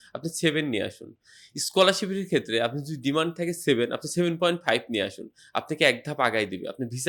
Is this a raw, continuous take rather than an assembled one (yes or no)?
yes